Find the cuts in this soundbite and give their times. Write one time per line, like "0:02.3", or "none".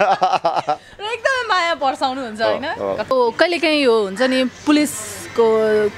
0:03.1